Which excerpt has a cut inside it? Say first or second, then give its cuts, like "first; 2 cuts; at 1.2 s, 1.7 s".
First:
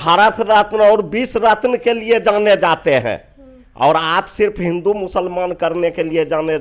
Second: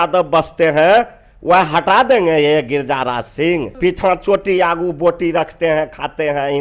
second; 1 cut; at 3.7 s